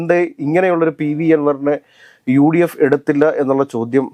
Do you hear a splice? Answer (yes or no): no